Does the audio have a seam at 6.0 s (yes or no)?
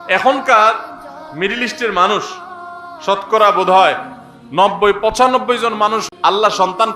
yes